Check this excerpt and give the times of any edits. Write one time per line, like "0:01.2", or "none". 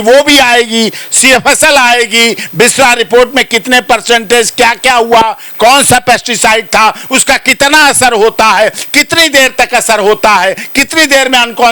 none